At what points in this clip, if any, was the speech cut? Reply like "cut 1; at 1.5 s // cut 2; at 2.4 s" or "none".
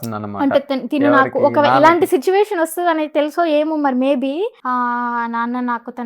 cut 1; at 4.6 s